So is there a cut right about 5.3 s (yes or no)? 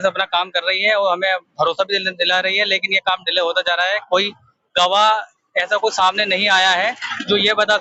no